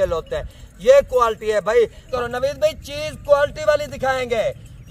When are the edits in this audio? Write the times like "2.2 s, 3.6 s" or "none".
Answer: 2.1 s